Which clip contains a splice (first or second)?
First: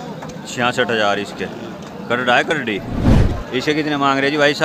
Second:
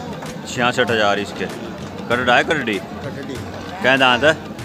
first